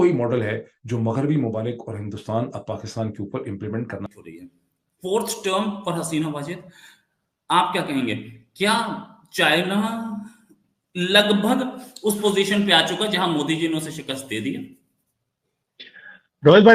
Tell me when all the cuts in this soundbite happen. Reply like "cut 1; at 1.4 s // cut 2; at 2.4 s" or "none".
cut 1; at 4.1 s